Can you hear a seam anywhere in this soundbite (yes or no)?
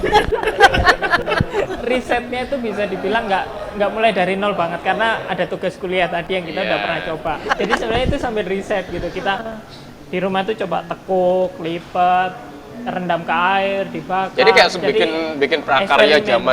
yes